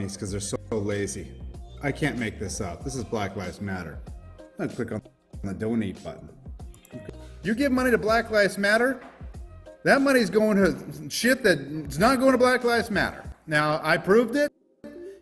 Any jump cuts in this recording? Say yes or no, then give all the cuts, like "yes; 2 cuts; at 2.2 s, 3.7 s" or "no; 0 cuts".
no; 0 cuts